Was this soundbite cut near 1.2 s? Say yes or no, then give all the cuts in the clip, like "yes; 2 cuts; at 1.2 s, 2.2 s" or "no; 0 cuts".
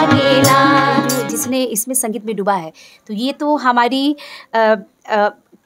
yes; 1 cut; at 1.2 s